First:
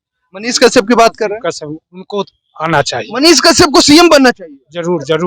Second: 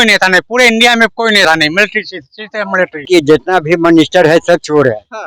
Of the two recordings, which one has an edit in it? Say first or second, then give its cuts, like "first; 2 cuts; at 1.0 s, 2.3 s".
second; 1 cut; at 3.1 s